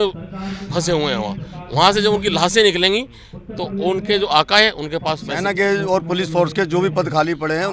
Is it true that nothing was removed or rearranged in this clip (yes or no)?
no